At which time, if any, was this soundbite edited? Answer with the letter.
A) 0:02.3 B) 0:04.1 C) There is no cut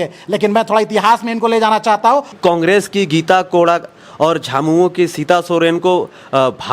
A